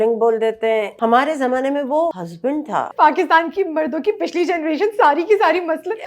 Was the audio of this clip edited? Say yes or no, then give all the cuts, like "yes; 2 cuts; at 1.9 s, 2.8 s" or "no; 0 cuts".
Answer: yes; 2 cuts; at 0.9 s, 2.7 s